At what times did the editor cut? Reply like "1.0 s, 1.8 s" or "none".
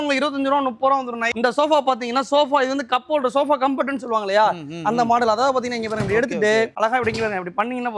1.3 s, 6.7 s